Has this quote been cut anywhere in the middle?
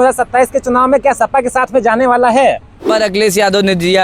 yes; 1 cut; at 2.9 s

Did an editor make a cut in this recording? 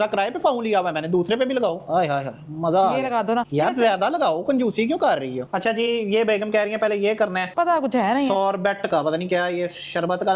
no; 0 cuts

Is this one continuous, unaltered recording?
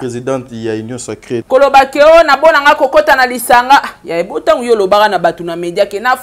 no; 1 cut; at 1.3 s

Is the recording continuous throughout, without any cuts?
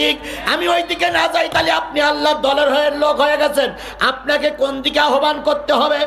yes; 0 cuts

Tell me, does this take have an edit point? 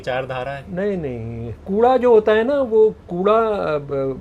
yes; 1 cut; at 1.6 s

